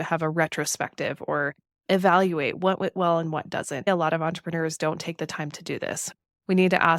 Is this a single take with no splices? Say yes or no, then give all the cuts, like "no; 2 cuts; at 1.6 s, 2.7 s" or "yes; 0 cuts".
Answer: no; 2 cuts; at 3.9 s, 6.1 s